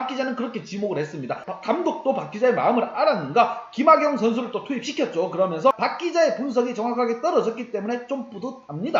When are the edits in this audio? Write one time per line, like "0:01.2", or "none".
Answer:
0:01.5
0:05.8